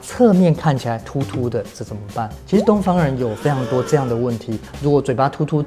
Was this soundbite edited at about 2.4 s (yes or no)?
no